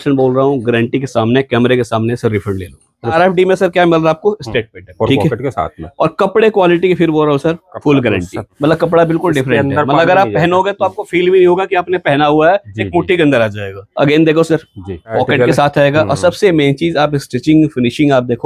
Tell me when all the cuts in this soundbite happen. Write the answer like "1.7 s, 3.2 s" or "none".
3.1 s, 4.8 s, 8.5 s, 13.8 s, 15.1 s